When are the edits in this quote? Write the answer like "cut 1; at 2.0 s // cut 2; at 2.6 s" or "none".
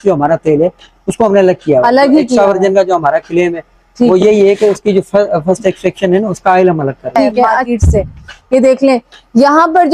cut 1; at 7.6 s